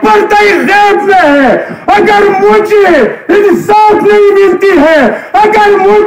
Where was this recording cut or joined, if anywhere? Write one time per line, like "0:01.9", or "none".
none